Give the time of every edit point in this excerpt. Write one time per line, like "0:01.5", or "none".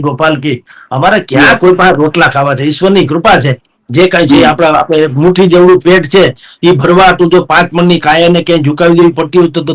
none